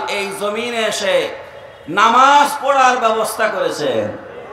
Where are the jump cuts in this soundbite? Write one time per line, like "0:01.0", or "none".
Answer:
none